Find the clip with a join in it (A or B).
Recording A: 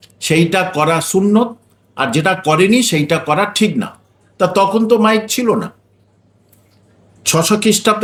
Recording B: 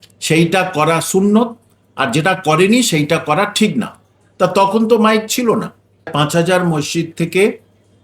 B